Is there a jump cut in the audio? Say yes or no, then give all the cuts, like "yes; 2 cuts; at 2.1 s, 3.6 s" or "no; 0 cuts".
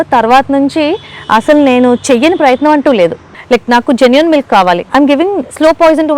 yes; 2 cuts; at 3.3 s, 4.8 s